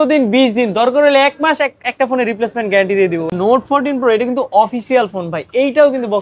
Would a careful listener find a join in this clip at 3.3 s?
yes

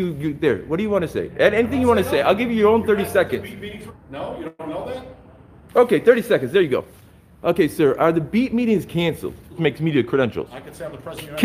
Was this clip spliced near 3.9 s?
yes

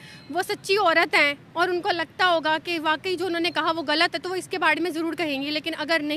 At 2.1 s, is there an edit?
no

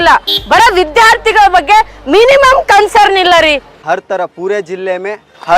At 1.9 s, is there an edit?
no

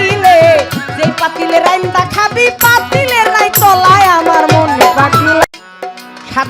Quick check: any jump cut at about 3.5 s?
no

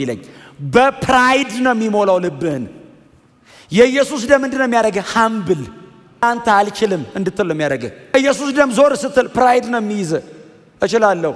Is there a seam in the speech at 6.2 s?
yes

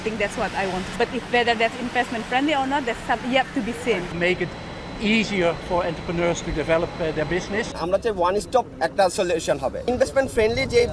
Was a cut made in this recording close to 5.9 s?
no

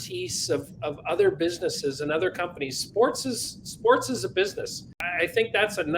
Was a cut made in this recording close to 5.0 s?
yes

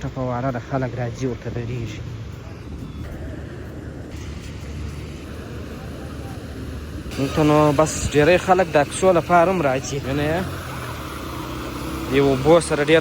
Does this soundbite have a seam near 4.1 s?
yes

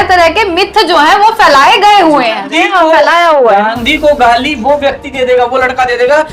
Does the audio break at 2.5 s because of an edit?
yes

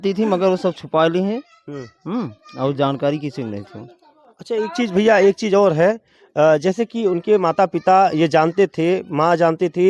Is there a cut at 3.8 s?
no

